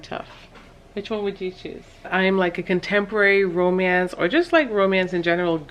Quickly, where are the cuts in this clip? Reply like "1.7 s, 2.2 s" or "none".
2.1 s